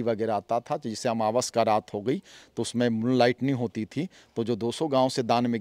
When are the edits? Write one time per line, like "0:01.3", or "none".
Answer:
none